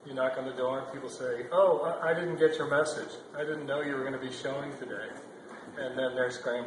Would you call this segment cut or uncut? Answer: cut